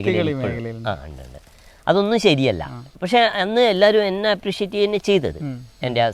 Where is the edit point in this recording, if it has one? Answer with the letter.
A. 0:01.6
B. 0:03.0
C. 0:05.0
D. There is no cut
D